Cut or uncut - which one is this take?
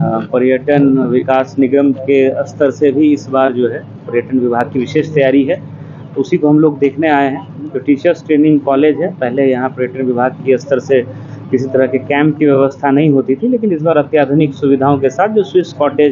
uncut